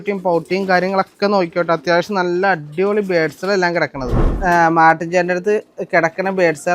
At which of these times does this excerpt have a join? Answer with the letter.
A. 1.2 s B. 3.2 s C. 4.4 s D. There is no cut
C